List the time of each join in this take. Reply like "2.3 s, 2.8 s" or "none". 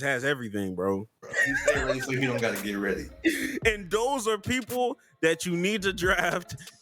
1.3 s

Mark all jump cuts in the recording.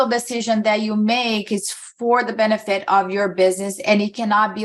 none

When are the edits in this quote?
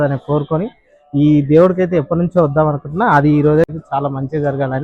3.7 s

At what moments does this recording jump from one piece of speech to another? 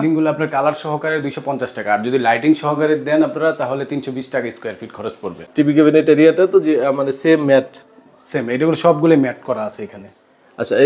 5.4 s

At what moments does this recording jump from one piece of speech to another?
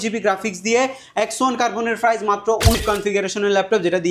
2.7 s

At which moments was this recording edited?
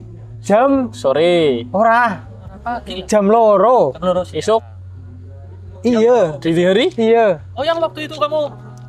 none

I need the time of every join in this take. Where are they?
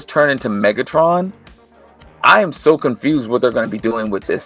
none

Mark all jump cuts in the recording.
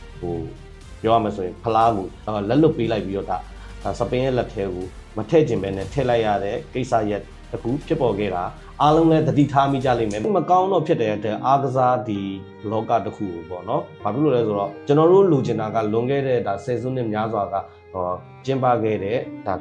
10.3 s

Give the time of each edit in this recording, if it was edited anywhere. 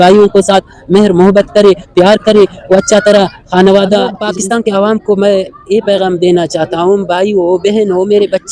4.2 s

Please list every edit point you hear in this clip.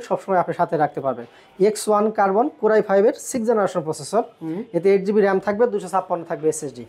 none

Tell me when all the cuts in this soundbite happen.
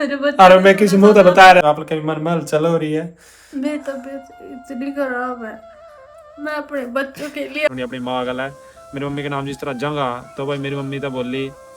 1.6 s, 7.7 s

